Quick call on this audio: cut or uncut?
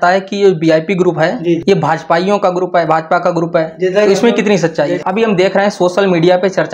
cut